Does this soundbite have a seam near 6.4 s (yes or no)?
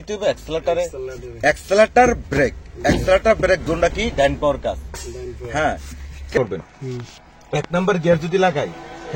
yes